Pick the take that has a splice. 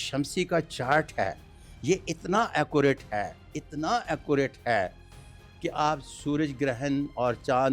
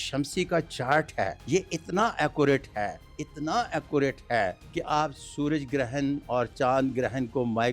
second; 2 cuts; at 1.4 s, 4.6 s

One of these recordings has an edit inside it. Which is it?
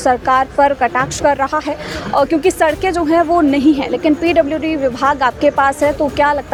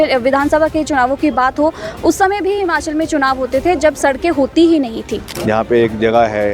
second; 1 cut; at 5.3 s

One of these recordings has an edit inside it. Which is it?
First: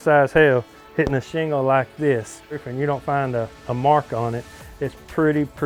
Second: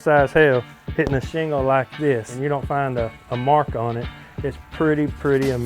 second; 1 cut; at 2.3 s

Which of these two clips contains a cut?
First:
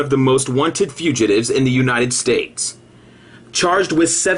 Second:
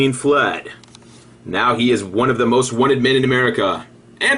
first; 1 cut; at 2.6 s

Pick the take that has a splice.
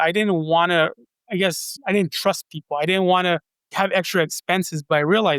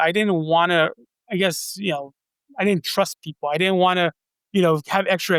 first; 2 cuts; at 1.7 s, 3.7 s

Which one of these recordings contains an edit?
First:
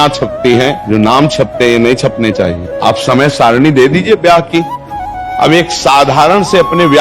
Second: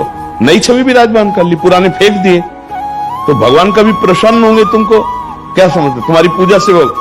first; 3 cuts; at 0.8 s, 2.6 s, 5.2 s

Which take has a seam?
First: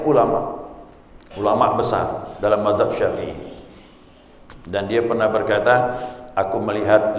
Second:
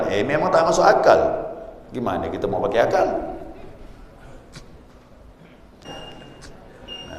second; 1 cut; at 5.7 s

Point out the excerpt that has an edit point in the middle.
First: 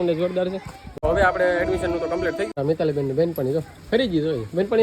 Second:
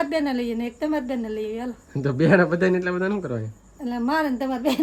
first; 2 cuts; at 1.0 s, 2.5 s

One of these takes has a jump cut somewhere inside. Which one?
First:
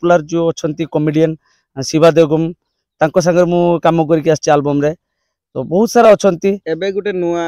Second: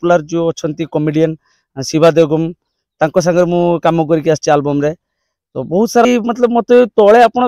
second; 1 cut; at 6.0 s

